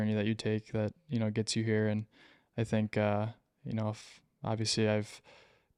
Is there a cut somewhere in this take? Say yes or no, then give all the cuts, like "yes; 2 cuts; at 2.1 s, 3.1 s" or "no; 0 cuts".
no; 0 cuts